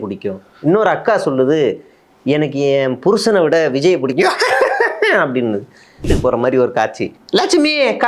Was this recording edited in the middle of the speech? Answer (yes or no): yes